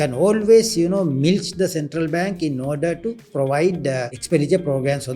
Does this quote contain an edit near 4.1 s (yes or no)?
yes